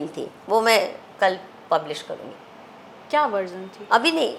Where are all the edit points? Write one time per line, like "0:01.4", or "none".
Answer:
none